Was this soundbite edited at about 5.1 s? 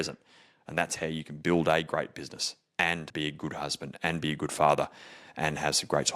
no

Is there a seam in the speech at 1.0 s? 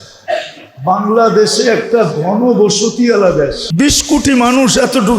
no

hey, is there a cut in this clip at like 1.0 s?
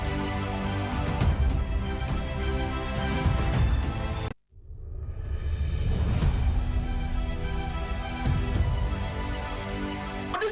no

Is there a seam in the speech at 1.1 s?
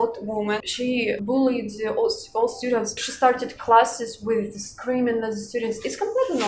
yes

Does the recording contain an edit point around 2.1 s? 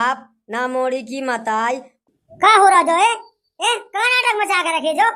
yes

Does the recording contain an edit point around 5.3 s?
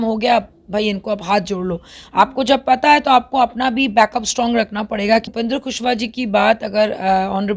yes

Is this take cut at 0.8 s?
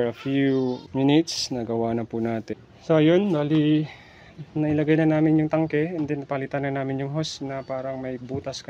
yes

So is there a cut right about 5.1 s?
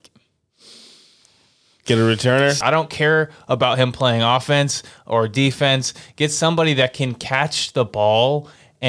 no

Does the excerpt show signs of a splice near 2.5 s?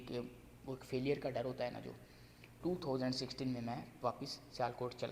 yes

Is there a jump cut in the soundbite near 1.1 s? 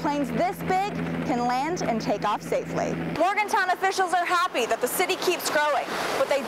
no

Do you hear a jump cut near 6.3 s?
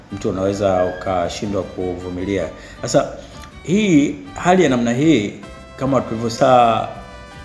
yes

